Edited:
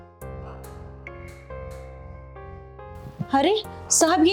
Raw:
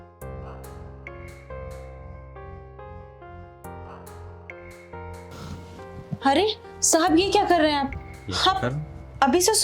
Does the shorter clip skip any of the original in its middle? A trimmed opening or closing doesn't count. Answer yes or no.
yes